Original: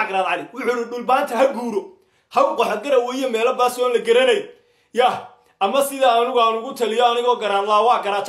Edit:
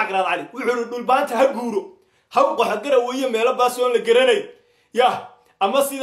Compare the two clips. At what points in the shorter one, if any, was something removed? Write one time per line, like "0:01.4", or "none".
none

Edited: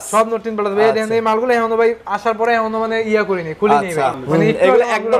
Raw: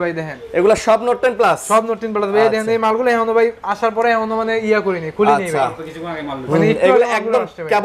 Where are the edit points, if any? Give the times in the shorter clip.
0:04.2

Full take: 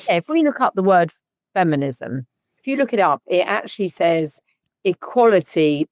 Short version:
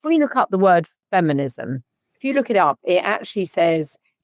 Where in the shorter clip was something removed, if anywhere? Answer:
0:01.0

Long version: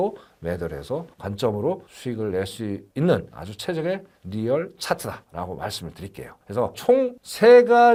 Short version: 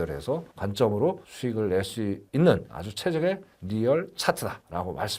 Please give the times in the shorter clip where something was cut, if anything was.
none

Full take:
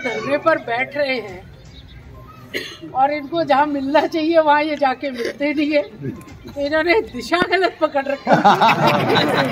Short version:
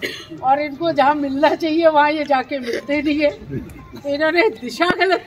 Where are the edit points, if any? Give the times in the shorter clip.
none

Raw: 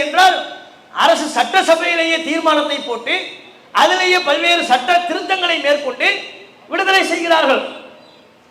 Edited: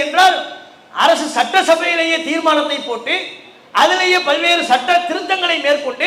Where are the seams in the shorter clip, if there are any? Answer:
none

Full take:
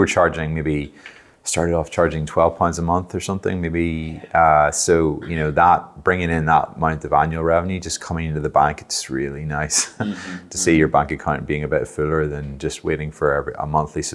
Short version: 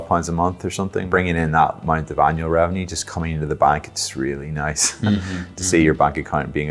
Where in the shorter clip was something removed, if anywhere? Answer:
0:01.0

